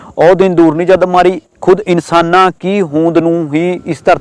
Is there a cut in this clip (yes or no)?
no